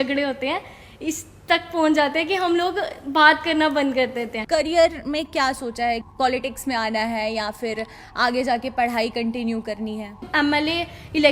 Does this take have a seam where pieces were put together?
yes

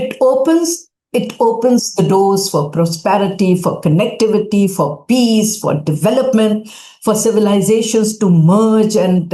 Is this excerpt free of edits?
yes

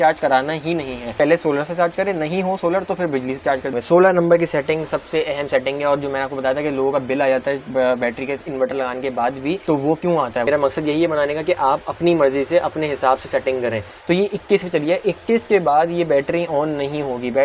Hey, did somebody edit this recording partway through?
yes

